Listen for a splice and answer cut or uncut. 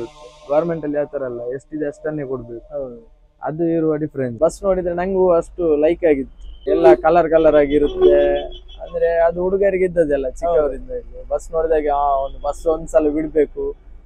cut